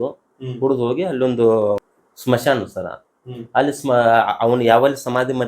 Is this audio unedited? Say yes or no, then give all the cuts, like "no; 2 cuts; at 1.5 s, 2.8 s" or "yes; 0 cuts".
no; 1 cut; at 1.8 s